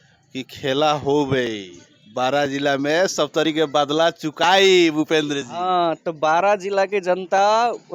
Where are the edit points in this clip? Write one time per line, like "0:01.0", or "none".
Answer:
none